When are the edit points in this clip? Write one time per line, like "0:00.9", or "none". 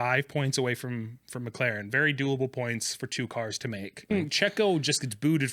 0:04.1